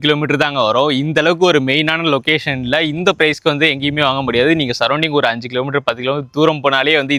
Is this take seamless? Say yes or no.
yes